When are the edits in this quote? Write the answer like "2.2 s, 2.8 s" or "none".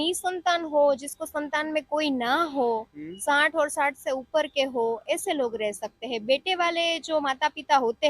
none